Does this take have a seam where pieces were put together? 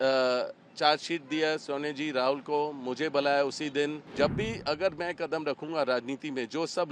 yes; 1 cut; at 4.0 s

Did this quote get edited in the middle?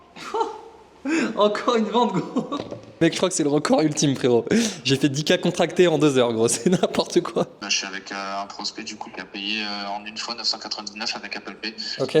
yes; 2 cuts; at 3.0 s, 7.7 s

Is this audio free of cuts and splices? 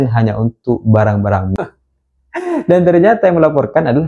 no; 1 cut; at 1.5 s

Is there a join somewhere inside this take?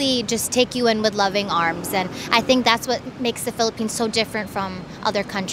no; 0 cuts

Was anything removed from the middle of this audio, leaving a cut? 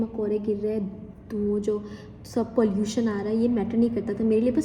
no; 0 cuts

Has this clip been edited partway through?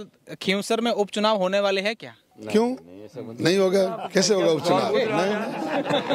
no; 0 cuts

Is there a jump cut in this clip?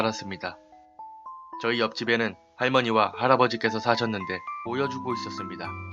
no; 0 cuts

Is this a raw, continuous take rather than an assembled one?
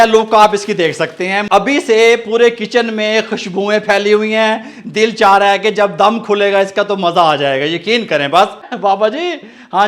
no; 2 cuts; at 1.4 s, 8.7 s

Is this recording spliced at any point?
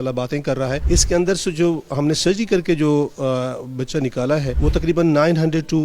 yes; 2 cuts; at 0.8 s, 4.5 s

